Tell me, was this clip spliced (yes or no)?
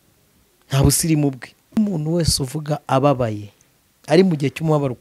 yes